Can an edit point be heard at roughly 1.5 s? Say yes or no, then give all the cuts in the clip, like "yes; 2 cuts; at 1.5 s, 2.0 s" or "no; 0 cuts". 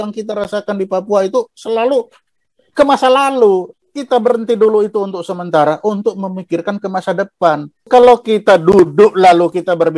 no; 2 cuts; at 3.8 s, 7.9 s